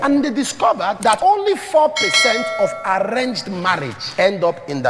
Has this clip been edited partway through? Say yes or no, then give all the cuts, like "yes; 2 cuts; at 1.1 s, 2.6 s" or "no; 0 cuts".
yes; 2 cuts; at 1.1 s, 4.0 s